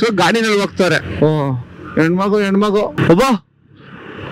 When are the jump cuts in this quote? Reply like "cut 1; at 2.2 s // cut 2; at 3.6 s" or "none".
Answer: cut 1; at 1.0 s // cut 2; at 2.9 s